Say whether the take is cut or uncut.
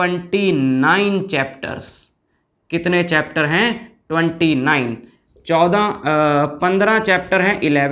uncut